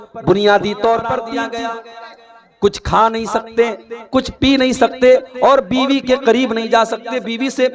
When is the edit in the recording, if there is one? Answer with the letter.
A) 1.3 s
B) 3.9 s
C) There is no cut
A